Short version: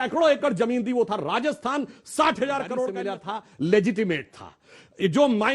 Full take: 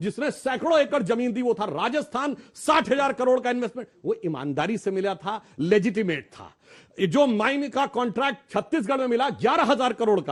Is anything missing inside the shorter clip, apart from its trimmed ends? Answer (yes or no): yes